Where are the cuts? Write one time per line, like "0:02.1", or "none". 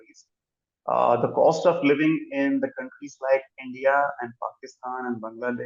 none